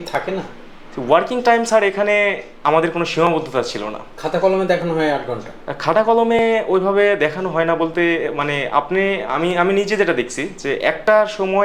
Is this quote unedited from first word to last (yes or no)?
yes